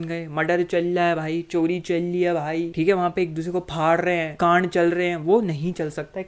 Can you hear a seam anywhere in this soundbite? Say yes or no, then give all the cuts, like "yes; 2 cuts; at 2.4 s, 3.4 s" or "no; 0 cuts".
yes; 2 cuts; at 2.7 s, 4.3 s